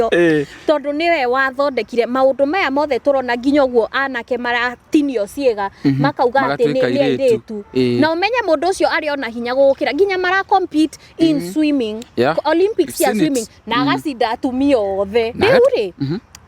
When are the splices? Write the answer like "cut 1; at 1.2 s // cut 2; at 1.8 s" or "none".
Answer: cut 1; at 15.3 s